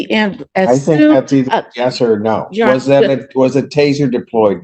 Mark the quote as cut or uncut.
uncut